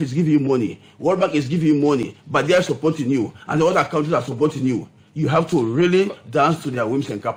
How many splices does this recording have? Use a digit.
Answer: 0